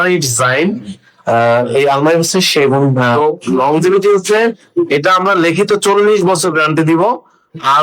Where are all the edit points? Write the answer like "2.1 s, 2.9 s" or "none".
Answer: 3.1 s